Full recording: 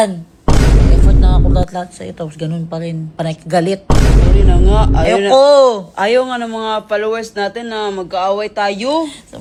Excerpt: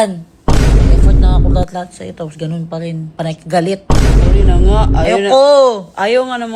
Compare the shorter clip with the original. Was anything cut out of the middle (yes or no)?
no